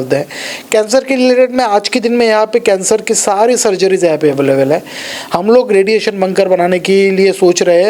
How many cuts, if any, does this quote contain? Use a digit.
0